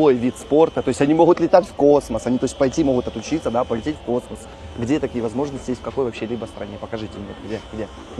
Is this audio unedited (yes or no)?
yes